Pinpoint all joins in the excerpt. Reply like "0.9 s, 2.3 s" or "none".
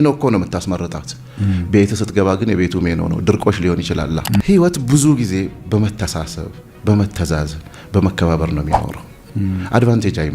4.4 s, 9.1 s